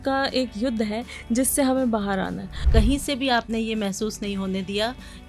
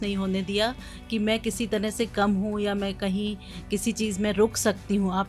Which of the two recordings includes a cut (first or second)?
first